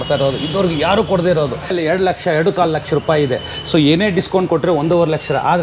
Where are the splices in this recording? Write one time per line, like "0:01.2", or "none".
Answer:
0:01.7